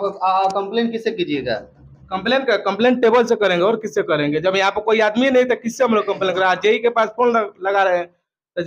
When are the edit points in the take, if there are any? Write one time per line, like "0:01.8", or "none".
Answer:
none